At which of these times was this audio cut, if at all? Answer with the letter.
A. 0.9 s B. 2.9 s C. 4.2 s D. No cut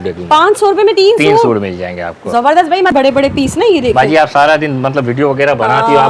B